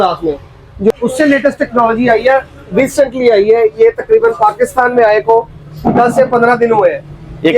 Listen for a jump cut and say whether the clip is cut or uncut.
cut